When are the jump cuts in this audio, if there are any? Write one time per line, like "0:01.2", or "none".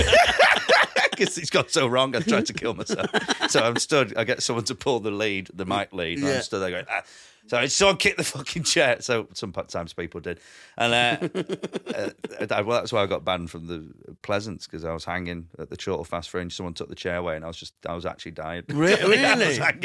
none